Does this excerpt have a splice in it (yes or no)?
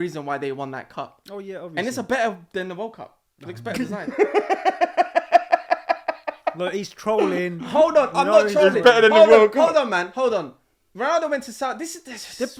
no